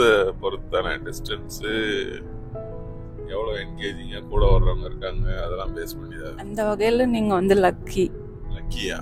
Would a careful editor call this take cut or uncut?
cut